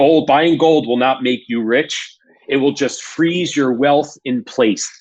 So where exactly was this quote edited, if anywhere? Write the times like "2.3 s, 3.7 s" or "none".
none